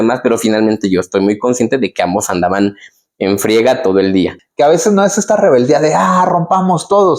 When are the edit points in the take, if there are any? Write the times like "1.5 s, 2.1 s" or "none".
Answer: 4.4 s